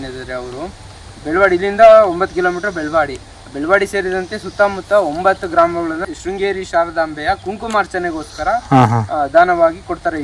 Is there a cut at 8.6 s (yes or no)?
no